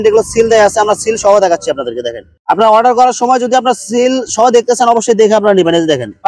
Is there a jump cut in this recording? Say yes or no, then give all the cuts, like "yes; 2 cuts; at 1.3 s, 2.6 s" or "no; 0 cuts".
no; 0 cuts